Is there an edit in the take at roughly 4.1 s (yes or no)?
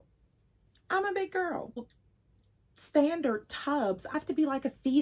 yes